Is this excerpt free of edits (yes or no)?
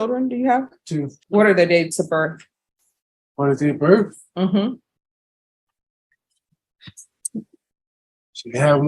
no